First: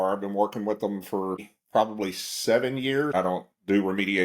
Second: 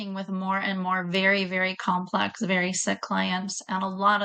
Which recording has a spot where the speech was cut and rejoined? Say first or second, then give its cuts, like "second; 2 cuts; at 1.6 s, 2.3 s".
first; 2 cuts; at 1.5 s, 3.1 s